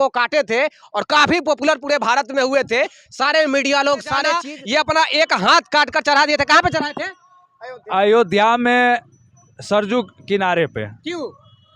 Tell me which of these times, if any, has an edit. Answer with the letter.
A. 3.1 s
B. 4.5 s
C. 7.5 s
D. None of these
B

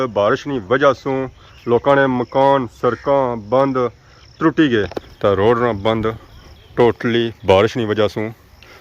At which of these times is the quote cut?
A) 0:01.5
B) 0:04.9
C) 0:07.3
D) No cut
B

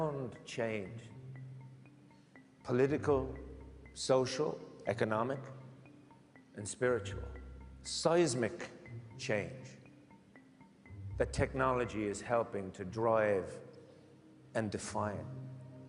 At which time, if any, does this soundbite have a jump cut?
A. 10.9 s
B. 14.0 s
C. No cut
C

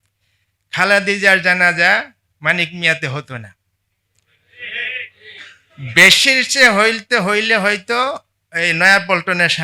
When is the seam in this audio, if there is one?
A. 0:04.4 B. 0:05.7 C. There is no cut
C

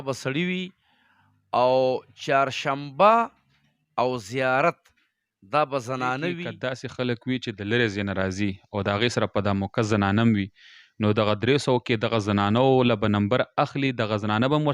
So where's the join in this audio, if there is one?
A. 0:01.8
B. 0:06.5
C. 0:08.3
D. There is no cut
B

